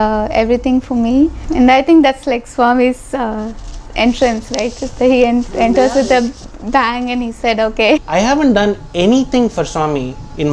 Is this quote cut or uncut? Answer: cut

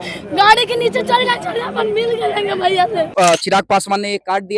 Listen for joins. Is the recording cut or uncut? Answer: cut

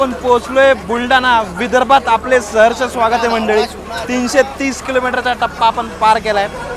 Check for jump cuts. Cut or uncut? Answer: uncut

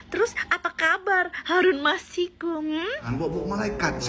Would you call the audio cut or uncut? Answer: cut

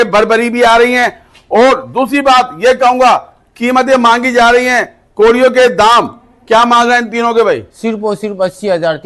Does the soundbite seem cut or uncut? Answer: uncut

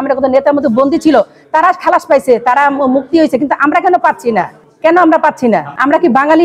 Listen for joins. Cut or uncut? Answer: uncut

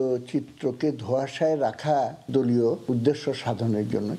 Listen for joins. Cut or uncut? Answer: cut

